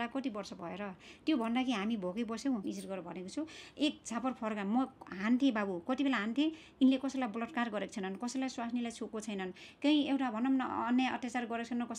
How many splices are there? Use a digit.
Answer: 1